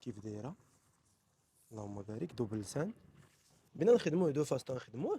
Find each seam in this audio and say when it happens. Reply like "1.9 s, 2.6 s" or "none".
3.6 s